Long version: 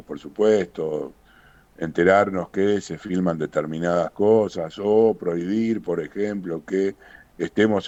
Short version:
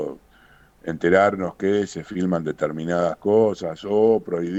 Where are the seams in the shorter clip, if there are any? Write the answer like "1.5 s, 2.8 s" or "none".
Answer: none